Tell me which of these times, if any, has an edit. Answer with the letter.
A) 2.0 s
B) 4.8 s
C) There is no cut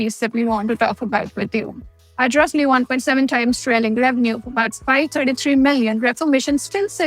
B